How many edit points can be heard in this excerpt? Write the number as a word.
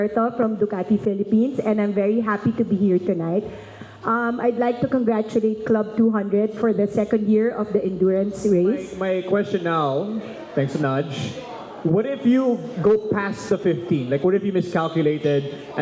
one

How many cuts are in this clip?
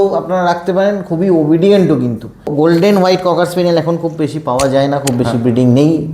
one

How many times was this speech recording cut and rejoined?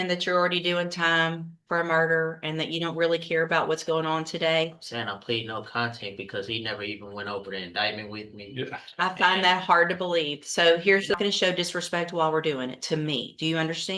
one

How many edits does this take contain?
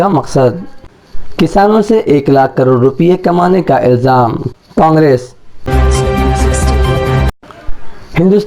one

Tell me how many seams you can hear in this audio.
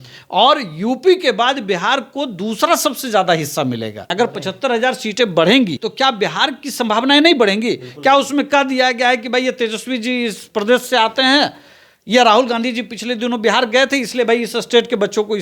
two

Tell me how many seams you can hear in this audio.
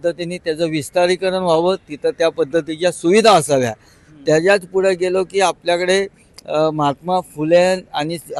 zero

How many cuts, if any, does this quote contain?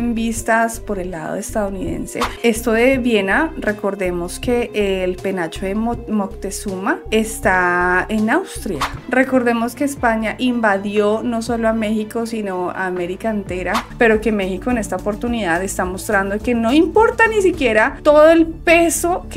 three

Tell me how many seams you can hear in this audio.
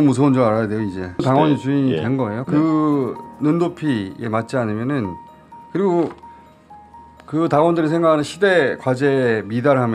two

